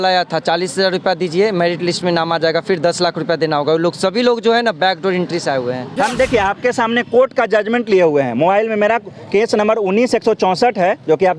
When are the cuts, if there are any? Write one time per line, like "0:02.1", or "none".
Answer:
0:05.9

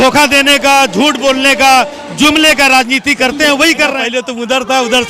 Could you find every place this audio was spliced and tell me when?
0:04.0

